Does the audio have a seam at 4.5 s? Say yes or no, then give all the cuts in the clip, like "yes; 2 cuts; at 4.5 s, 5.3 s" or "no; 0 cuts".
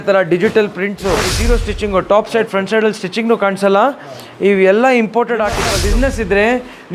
no; 2 cuts; at 1.3 s, 5.8 s